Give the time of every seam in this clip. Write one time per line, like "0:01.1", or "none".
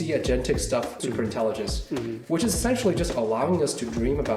0:00.9